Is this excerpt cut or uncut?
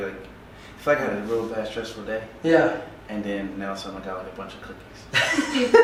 uncut